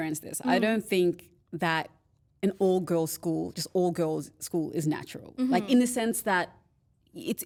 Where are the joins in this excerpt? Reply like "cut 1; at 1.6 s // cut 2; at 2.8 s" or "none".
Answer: none